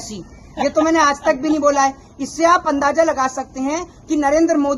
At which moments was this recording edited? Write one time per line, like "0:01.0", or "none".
none